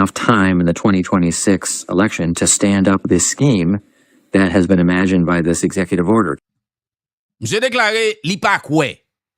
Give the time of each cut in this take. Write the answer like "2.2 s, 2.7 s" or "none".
none